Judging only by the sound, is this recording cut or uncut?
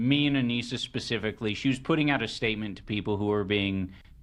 uncut